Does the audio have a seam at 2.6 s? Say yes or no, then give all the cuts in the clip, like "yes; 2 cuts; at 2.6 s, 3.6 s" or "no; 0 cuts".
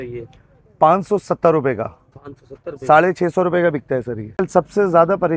no; 1 cut; at 4.4 s